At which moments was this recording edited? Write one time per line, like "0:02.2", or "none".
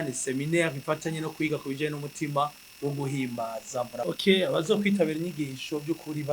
0:04.0